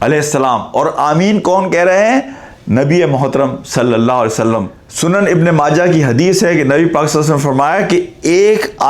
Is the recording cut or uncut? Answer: cut